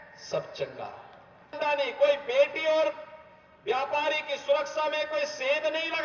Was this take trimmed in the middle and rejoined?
yes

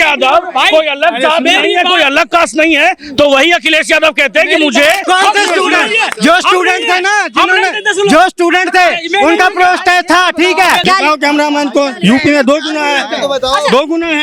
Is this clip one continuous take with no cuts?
no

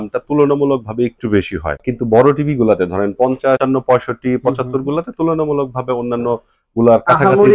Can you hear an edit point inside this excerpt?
yes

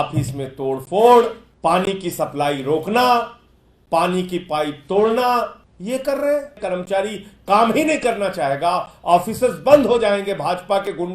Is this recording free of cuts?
no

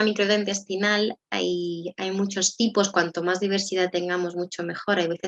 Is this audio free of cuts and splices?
yes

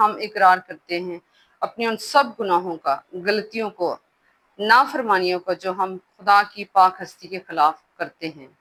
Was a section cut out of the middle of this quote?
no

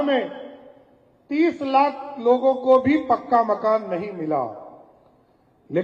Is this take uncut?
yes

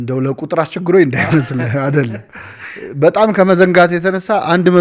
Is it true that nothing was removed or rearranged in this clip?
yes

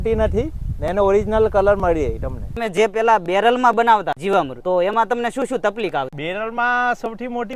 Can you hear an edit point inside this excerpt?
yes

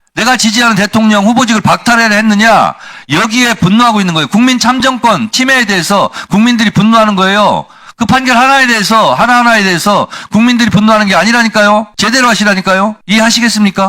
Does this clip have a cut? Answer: yes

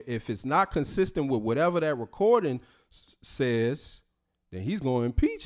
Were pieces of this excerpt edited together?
no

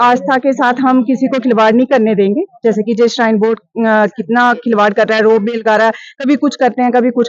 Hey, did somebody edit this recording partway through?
no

